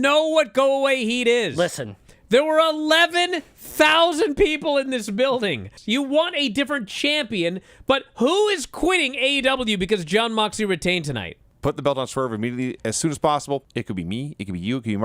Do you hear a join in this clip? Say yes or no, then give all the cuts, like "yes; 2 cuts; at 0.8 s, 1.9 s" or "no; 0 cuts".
yes; 3 cuts; at 5.7 s, 11.4 s, 12.8 s